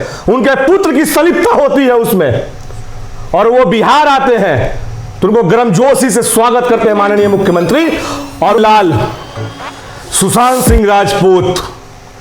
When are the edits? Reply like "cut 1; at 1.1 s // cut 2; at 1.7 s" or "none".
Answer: cut 1; at 8.6 s